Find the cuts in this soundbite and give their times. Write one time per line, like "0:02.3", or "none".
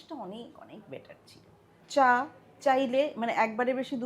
0:01.8

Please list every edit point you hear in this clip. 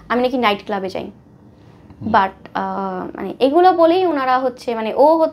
none

